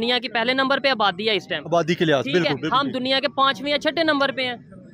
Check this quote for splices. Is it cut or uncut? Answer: uncut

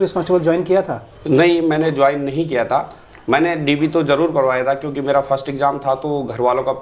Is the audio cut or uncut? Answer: uncut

